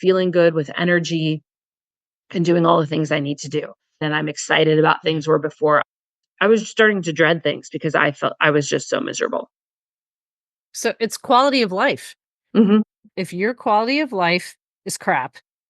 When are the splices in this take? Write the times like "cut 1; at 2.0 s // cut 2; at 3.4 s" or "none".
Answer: cut 1; at 4.0 s // cut 2; at 13.0 s